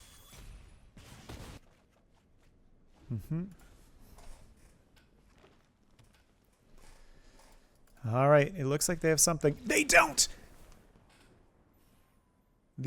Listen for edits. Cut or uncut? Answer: cut